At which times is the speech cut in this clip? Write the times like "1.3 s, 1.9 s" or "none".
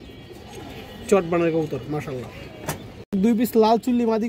3.2 s